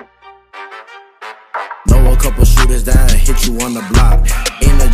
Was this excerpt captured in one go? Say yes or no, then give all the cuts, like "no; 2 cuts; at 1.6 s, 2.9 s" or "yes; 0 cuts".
no; 1 cut; at 1.1 s